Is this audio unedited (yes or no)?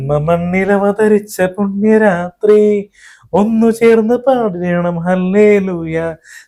yes